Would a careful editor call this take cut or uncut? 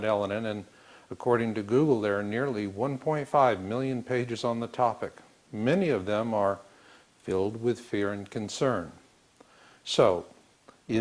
cut